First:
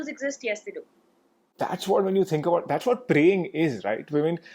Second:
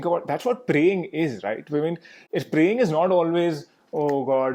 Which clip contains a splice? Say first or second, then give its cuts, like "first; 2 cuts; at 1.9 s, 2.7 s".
first; 1 cut; at 1.4 s